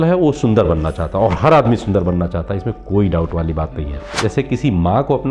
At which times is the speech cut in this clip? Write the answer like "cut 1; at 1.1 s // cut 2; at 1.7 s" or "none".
cut 1; at 4.1 s